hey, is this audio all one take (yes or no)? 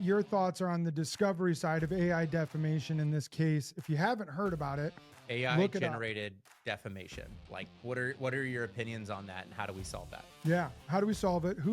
yes